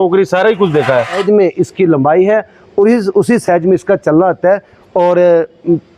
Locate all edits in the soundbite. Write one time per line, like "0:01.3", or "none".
0:01.2

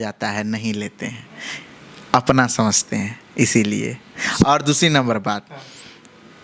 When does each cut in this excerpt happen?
none

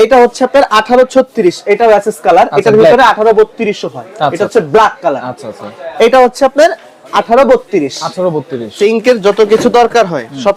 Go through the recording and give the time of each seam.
0:08.6

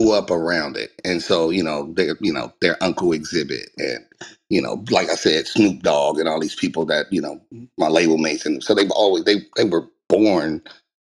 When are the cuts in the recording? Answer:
none

